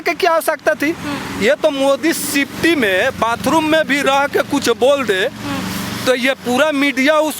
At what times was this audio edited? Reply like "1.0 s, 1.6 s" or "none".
none